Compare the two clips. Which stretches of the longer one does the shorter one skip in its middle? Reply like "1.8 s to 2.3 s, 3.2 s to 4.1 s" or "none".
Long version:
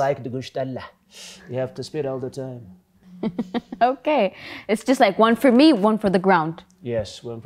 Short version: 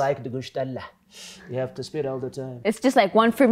2.5 s to 4.5 s